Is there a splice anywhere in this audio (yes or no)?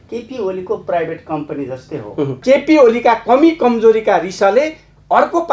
yes